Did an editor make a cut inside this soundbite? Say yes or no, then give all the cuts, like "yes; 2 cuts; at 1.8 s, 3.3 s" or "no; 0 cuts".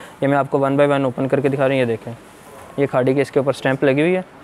no; 0 cuts